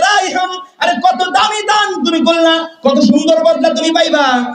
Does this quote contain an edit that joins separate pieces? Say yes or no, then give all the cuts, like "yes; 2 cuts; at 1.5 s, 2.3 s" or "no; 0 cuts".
no; 0 cuts